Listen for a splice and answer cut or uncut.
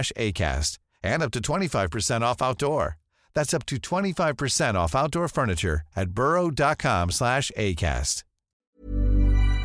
cut